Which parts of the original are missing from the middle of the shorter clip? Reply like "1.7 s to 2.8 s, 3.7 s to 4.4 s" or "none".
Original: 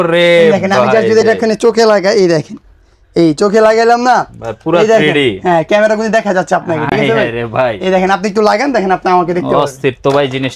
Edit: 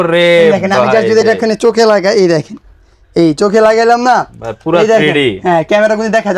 none